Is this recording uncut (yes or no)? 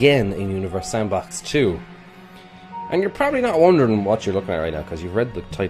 no